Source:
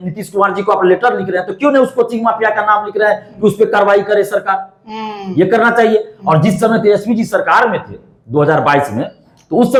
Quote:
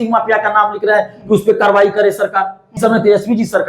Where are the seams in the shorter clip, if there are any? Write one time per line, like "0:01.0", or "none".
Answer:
0:02.8